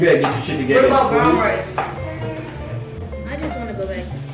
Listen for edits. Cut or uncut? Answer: uncut